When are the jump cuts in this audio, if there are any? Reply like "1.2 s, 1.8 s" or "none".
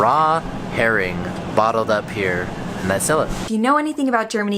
3.4 s